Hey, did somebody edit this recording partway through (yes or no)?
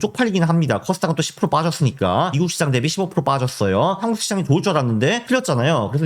yes